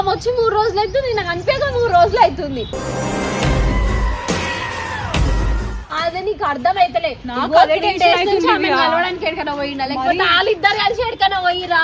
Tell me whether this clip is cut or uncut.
uncut